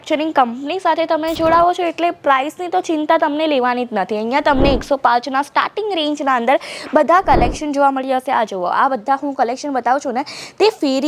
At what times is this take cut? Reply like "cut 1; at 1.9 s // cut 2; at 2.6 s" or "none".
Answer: none